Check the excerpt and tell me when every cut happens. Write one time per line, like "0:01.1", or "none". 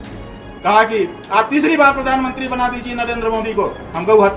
none